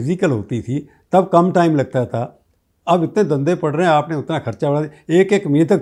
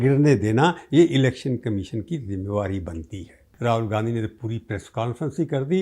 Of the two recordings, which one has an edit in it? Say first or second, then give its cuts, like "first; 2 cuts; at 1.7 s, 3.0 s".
second; 1 cut; at 3.5 s